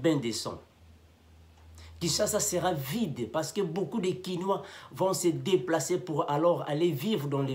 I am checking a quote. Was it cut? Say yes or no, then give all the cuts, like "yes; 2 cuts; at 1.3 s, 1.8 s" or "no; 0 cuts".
no; 0 cuts